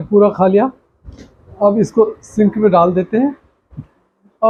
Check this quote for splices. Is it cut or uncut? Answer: uncut